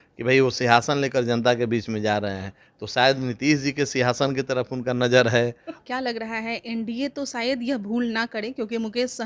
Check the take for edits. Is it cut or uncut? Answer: cut